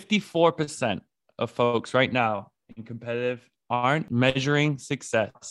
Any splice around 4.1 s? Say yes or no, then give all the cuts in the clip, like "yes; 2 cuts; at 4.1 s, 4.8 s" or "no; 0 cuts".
yes; 1 cut; at 4.1 s